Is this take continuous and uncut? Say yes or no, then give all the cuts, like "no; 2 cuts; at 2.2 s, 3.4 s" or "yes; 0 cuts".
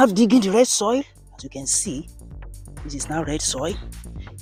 yes; 0 cuts